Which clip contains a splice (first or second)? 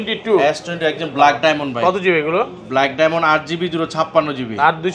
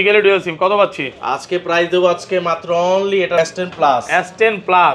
second